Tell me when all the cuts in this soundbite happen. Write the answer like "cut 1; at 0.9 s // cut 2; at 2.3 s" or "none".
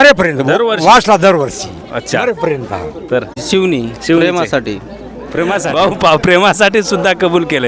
cut 1; at 3.4 s // cut 2; at 5.6 s